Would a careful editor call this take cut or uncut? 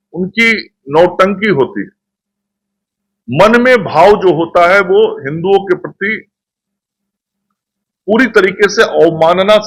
uncut